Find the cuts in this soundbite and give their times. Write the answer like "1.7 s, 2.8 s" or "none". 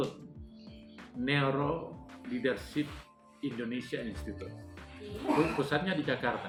none